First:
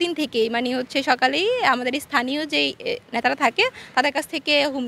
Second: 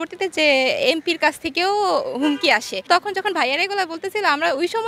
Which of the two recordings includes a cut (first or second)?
second